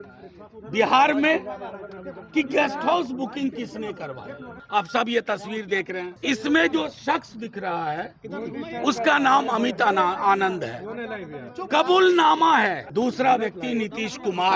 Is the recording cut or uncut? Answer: cut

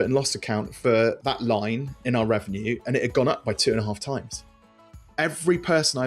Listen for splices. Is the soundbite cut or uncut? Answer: cut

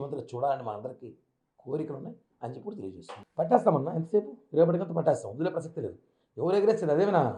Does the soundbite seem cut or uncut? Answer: cut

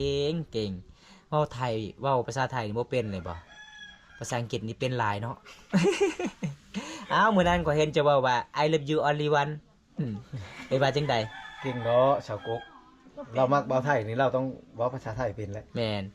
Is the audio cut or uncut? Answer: uncut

